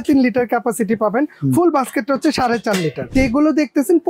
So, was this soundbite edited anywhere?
yes; 1 cut; at 3.1 s

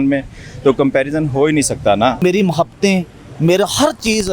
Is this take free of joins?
no; 1 cut; at 2.2 s

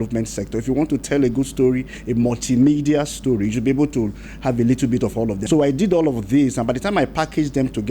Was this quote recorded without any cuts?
no; 1 cut; at 5.4 s

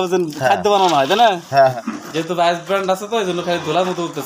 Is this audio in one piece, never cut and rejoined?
no; 1 cut; at 1.7 s

